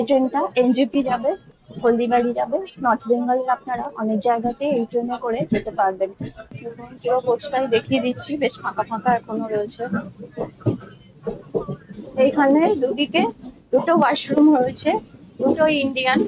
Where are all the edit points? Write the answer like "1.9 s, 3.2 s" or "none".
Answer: 6.4 s, 11.9 s